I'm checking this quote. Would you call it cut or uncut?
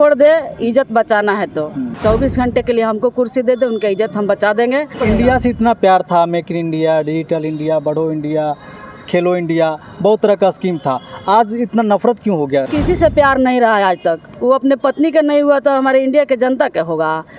cut